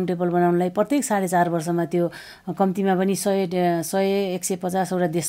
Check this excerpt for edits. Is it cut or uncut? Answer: uncut